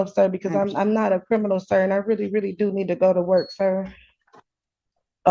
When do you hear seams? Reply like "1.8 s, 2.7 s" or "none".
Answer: none

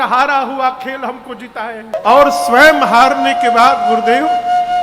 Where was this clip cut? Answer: 1.9 s

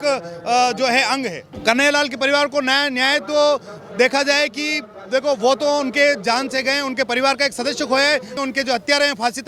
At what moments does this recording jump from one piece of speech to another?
1.5 s, 8.3 s

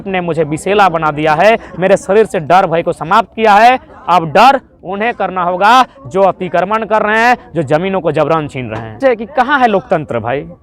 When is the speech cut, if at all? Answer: 8.8 s

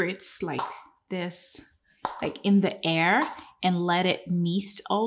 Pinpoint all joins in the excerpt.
none

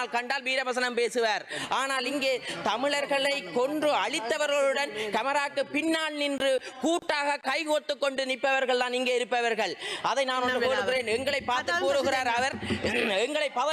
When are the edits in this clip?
none

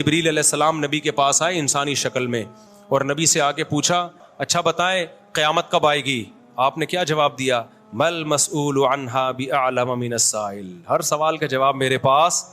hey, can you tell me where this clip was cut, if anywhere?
4.3 s

